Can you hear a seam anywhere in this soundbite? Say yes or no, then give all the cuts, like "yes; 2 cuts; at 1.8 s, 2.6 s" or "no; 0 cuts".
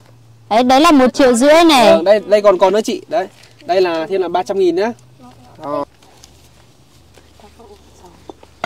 no; 0 cuts